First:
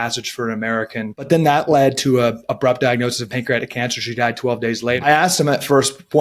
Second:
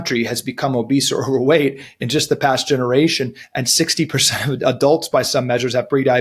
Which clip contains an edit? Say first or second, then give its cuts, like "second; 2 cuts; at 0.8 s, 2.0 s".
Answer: first; 2 cuts; at 1.3 s, 5.0 s